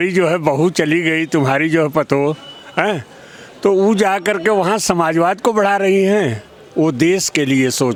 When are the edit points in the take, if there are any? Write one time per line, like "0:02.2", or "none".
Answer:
none